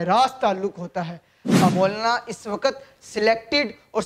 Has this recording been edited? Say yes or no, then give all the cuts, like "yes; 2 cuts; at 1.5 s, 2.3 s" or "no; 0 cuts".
yes; 1 cut; at 1.7 s